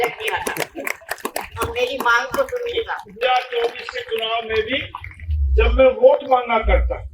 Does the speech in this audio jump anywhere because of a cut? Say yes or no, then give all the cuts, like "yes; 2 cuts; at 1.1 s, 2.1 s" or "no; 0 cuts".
yes; 1 cut; at 3.2 s